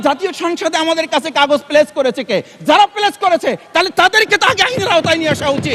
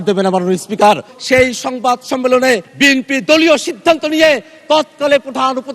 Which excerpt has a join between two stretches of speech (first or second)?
second